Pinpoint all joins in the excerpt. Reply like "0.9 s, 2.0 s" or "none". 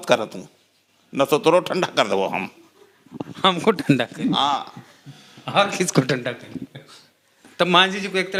none